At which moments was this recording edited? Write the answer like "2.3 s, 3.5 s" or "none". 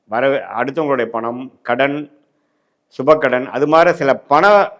none